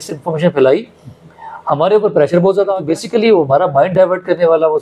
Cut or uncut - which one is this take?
cut